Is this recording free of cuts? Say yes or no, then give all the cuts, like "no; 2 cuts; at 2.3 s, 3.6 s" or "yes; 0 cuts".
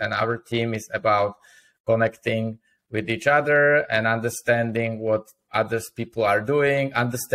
yes; 0 cuts